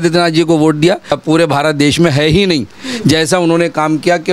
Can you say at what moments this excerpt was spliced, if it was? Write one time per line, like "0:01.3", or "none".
0:01.1